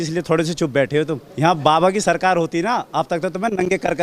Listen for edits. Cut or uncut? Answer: cut